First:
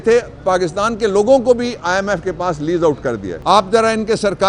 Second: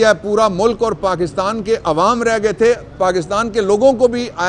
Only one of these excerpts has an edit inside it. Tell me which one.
first; 1 cut; at 3.3 s

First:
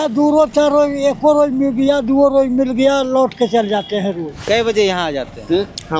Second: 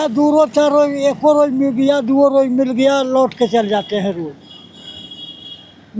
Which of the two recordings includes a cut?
first; 1 cut; at 4.5 s

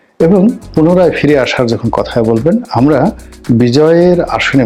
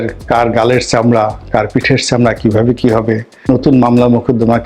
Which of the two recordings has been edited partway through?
second; 1 cut; at 3.5 s

